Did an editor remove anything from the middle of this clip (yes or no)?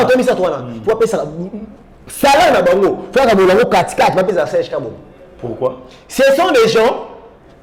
no